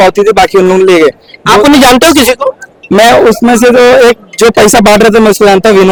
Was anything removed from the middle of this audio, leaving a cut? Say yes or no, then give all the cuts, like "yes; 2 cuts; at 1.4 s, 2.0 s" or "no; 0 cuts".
no; 0 cuts